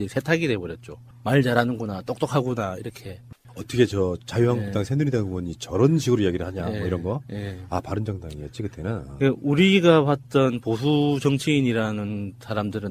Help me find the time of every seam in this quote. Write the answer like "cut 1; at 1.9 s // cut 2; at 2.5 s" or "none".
cut 1; at 3.2 s